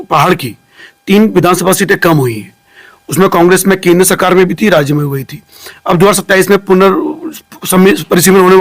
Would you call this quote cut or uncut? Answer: uncut